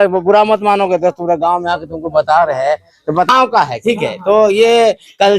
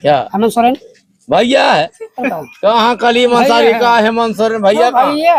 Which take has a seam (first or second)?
first